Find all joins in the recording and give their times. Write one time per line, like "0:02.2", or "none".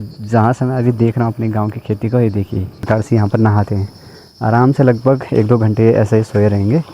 0:02.9